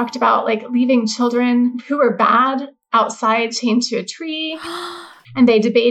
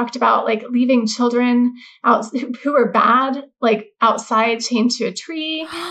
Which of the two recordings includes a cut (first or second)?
first